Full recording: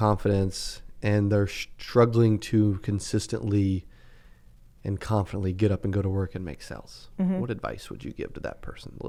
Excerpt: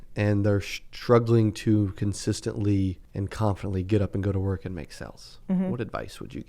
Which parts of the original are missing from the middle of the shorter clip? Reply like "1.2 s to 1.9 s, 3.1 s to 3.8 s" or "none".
3.9 s to 4.7 s